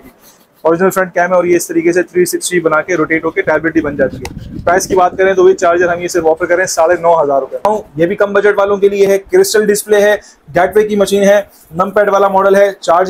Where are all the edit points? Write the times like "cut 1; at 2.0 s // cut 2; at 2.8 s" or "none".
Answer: cut 1; at 7.6 s

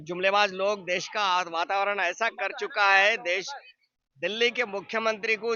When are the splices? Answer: none

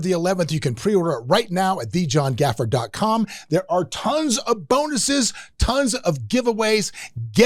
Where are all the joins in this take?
none

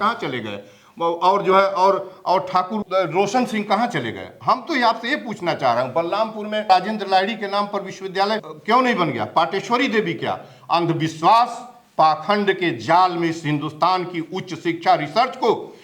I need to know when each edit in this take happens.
cut 1; at 2.8 s // cut 2; at 6.7 s // cut 3; at 8.5 s

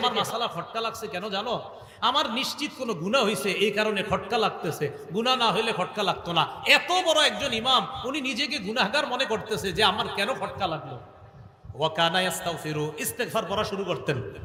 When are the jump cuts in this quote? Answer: none

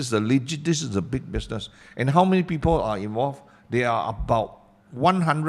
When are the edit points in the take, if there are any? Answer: none

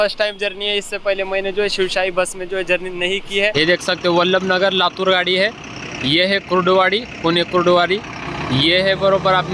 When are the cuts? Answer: cut 1; at 3.5 s

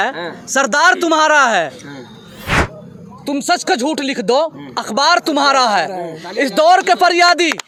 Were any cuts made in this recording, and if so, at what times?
none

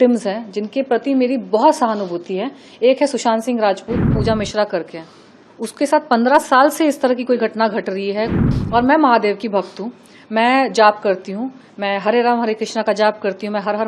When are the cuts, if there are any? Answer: cut 1; at 4.2 s // cut 2; at 8.4 s

